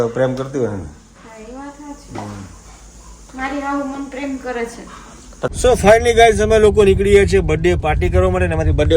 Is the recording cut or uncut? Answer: cut